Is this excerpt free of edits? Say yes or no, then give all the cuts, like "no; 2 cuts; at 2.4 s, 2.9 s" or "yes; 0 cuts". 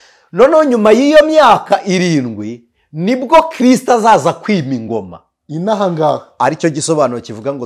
yes; 0 cuts